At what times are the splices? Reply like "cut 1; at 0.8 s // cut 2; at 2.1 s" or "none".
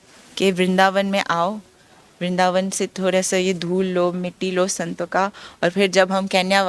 none